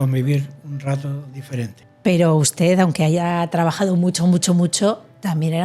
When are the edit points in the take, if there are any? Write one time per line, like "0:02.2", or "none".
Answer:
none